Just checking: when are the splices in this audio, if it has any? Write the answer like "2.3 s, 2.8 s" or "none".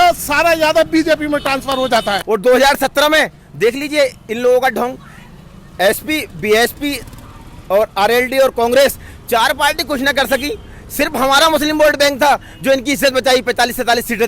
2.2 s